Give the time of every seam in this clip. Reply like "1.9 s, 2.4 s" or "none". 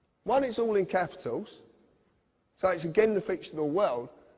none